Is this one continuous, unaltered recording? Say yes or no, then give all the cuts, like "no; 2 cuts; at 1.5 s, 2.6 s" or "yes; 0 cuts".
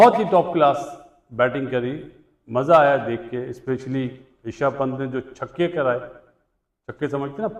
yes; 0 cuts